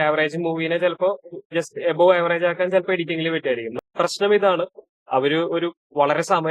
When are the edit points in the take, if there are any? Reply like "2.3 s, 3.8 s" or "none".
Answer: 3.8 s